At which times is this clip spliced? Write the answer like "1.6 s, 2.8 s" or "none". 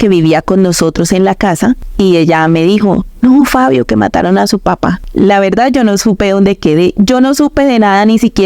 1.9 s, 5.0 s